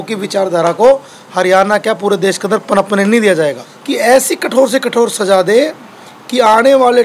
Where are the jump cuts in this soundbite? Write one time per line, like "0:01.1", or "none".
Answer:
0:03.7